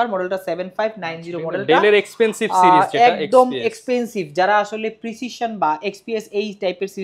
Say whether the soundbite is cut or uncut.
uncut